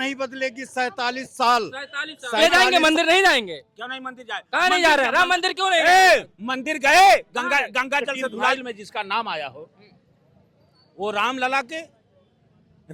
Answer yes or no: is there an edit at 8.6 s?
yes